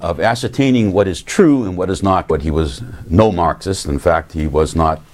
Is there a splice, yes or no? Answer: no